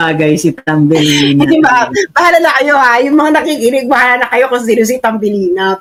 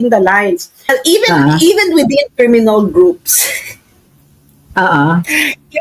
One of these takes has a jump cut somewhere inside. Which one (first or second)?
second